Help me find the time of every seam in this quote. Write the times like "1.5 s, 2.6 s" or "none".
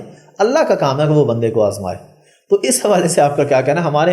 none